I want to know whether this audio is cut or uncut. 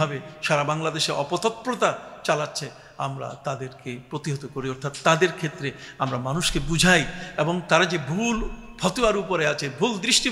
uncut